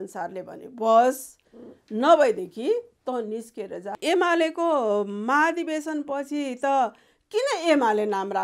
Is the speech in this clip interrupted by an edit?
yes; 1 cut; at 4.0 s

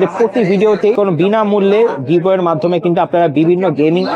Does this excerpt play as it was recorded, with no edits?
no; 1 cut; at 0.9 s

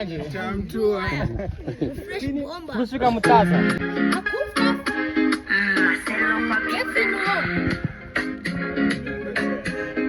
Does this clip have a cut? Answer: yes; 1 cut; at 3.8 s

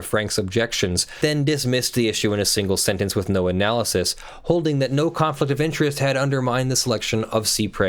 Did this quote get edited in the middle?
yes; 1 cut; at 1.2 s

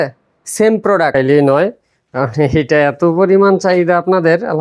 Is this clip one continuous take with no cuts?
no; 1 cut; at 1.1 s

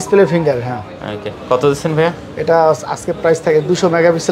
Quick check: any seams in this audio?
no; 0 cuts

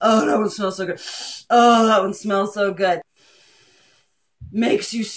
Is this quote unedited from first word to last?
no; 1 cut; at 3.2 s

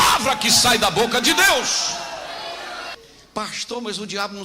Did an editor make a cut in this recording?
yes; 1 cut; at 2.9 s

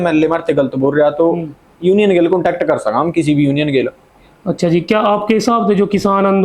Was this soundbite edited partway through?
yes; 1 cut; at 4.0 s

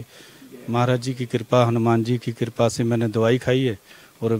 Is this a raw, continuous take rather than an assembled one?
yes; 0 cuts

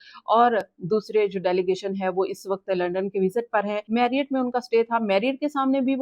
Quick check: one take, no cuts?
no; 1 cut; at 3.8 s

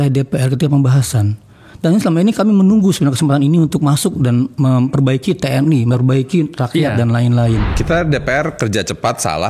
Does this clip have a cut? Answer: yes; 1 cut; at 7.7 s

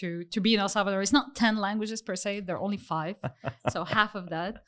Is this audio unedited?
yes; 0 cuts

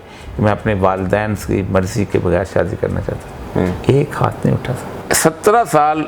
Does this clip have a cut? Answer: yes; 1 cut; at 5.0 s

